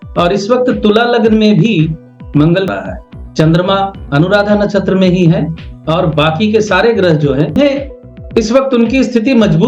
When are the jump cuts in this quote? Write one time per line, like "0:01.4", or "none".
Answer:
0:02.7
0:07.6

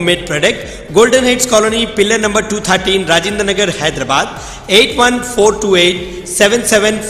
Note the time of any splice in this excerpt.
none

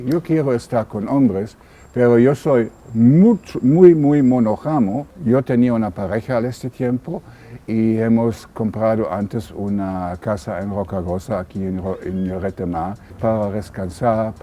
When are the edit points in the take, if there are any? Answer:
0:05.1
0:13.2

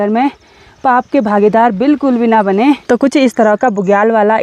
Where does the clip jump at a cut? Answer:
0:02.8

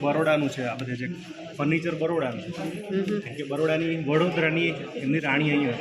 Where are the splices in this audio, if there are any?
none

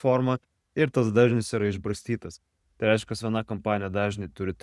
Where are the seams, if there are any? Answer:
none

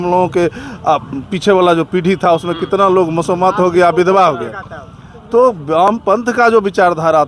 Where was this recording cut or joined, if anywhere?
none

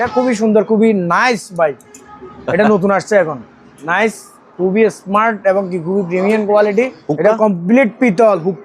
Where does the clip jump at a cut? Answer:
0:07.0

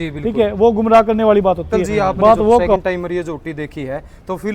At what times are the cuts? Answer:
0:02.8

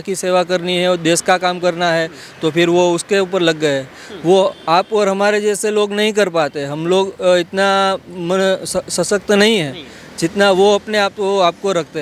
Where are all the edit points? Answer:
none

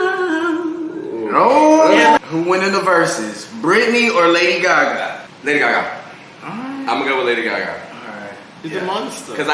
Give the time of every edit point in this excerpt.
0:02.2
0:05.3

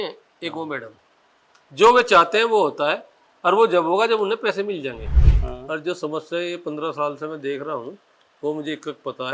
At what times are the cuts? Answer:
0:05.3

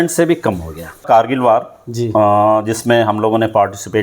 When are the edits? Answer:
0:01.0

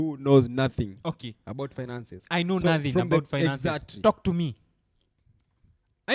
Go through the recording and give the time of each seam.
none

